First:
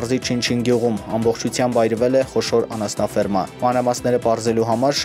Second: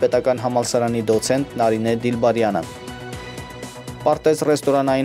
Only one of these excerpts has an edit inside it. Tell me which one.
second; 2 cuts; at 2.7 s, 4.0 s

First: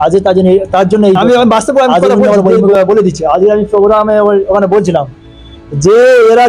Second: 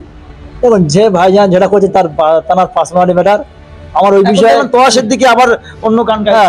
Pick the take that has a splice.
first; 1 cut; at 1.2 s

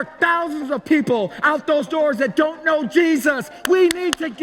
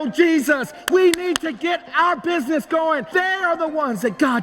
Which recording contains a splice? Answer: second; 1 cut; at 3.0 s

